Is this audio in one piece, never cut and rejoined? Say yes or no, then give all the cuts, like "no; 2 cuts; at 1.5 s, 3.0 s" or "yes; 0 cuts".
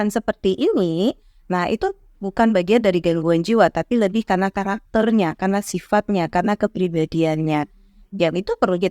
yes; 0 cuts